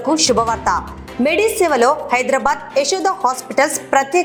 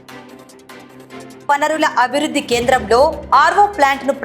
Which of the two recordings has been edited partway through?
second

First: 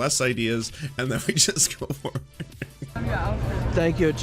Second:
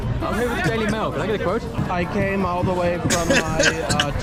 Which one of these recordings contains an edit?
first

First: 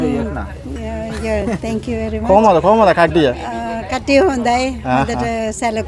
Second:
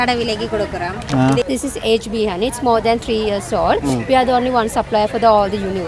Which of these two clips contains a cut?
second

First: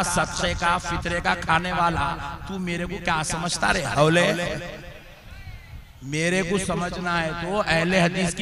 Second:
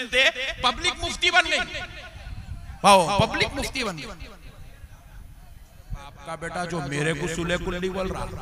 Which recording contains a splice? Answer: second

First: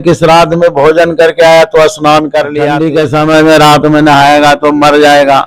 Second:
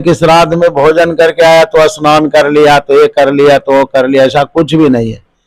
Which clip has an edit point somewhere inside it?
first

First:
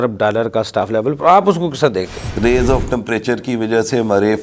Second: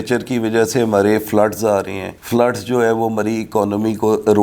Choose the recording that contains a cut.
first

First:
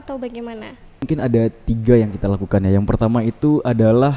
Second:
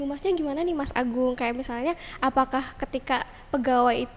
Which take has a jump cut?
first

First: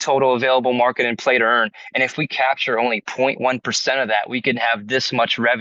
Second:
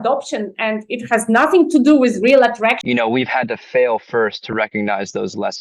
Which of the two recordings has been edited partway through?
second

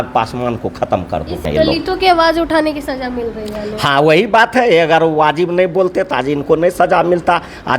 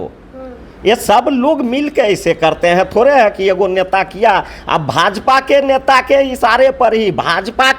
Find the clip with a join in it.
first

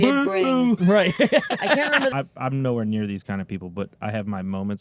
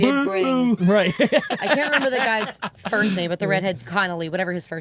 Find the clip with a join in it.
first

